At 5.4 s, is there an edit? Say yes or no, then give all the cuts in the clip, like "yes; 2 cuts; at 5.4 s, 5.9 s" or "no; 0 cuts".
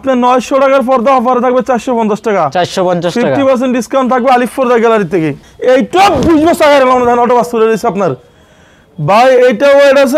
yes; 1 cut; at 5.4 s